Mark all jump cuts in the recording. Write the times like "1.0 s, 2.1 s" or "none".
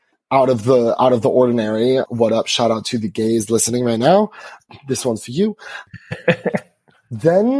2.1 s